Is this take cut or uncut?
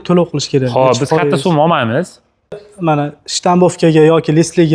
cut